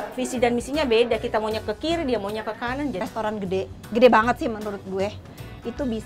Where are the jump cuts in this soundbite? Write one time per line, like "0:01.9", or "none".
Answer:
0:03.0